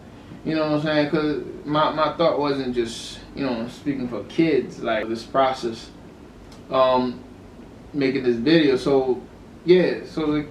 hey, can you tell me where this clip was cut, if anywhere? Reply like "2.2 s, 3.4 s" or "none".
5.0 s